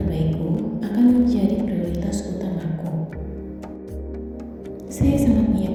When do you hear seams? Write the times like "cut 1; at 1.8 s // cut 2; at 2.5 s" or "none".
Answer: none